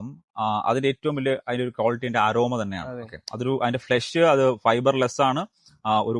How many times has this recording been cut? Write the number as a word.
zero